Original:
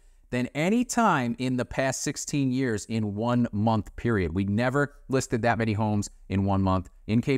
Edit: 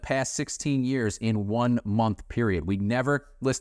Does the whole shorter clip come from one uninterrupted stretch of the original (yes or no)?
yes